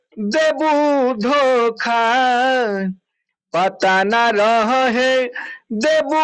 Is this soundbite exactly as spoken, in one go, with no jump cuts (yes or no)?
yes